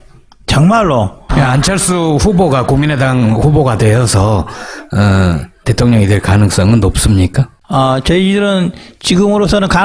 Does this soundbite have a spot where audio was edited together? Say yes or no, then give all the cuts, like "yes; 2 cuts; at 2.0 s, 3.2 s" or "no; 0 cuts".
no; 0 cuts